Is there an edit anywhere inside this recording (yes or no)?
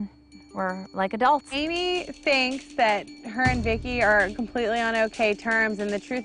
yes